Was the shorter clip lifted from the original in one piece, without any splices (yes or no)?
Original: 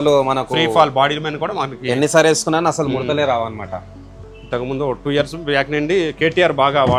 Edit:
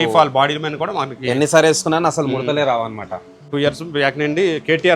no